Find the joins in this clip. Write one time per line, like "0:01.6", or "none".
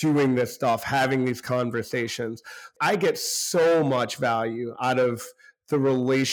0:02.7